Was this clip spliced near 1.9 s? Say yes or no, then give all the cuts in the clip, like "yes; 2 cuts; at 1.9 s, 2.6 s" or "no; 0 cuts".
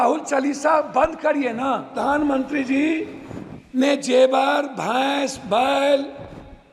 yes; 1 cut; at 1.9 s